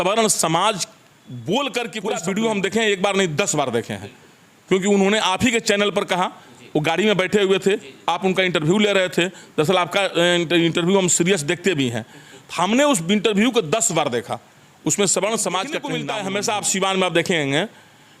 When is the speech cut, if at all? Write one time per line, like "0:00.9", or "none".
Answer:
0:02.0
0:16.0